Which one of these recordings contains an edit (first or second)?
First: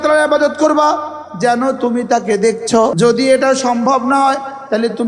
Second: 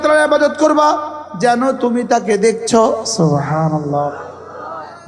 first